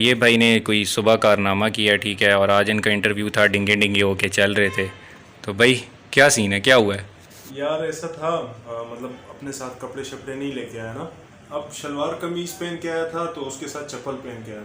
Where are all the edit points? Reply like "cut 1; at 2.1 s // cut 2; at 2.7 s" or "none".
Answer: none

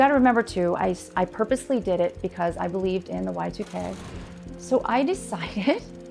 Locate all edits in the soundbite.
cut 1; at 4.1 s

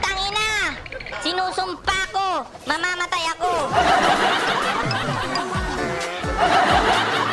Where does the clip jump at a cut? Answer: cut 1; at 6.3 s

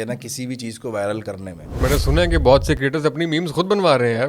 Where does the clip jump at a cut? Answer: cut 1; at 1.8 s

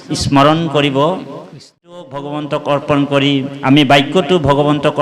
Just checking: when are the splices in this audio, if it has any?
cut 1; at 1.9 s

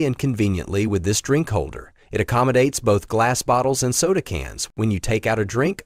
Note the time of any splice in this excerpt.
none

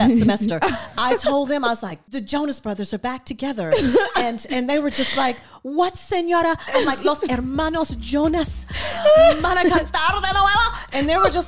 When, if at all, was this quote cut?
cut 1; at 2.0 s

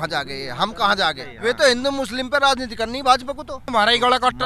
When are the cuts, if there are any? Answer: cut 1; at 1.3 s // cut 2; at 3.7 s

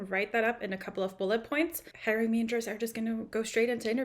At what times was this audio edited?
cut 1; at 1.9 s // cut 2; at 3.3 s

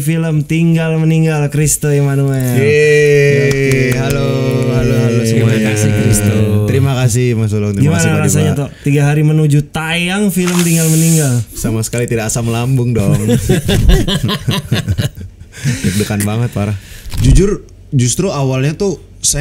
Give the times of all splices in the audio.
cut 1; at 11.6 s // cut 2; at 17.0 s

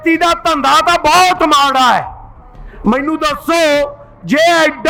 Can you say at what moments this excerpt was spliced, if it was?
none

